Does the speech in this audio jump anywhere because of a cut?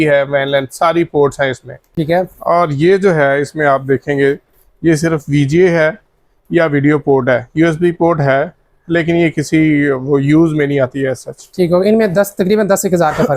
no; 0 cuts

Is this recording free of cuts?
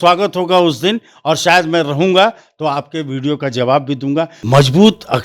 no; 1 cut; at 4.4 s

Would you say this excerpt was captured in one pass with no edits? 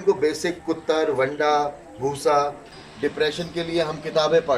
no; 1 cut; at 2.7 s

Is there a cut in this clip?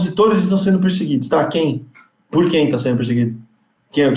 no; 0 cuts

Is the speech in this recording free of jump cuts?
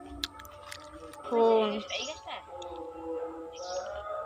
no; 1 cut; at 1.2 s

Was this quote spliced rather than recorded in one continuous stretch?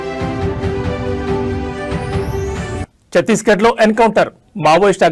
yes; 1 cut; at 2.3 s

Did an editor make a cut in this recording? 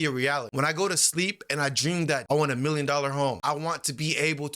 yes; 2 cuts; at 2.2 s, 3.4 s

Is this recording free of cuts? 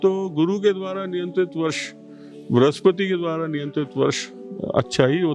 yes; 0 cuts

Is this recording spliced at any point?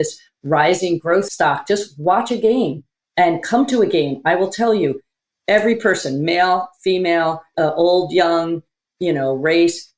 yes; 2 cuts; at 1.3 s, 7.5 s

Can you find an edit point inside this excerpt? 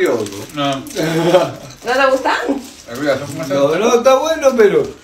no; 0 cuts

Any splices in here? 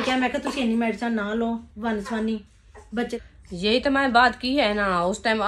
yes; 1 cut; at 3.1 s

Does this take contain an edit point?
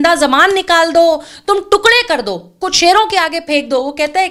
no; 0 cuts

